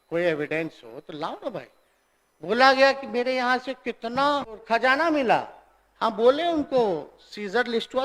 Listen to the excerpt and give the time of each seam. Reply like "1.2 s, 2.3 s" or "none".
4.6 s

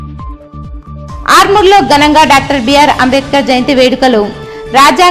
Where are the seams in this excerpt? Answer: none

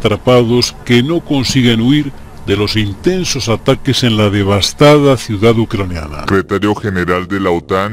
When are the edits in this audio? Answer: 6.2 s

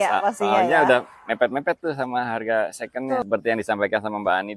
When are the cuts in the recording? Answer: 3.2 s

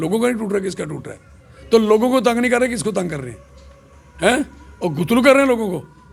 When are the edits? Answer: none

